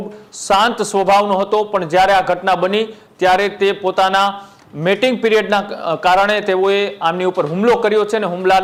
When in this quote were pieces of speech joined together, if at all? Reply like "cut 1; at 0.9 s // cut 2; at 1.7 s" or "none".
none